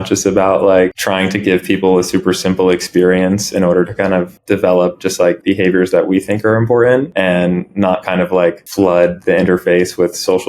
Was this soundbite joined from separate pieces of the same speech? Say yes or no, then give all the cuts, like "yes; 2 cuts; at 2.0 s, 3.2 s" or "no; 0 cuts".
yes; 5 cuts; at 1.0 s, 4.3 s, 5.4 s, 7.1 s, 8.6 s